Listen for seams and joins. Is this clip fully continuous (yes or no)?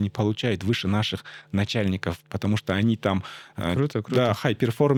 yes